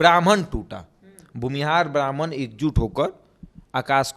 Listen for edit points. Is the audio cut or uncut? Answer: uncut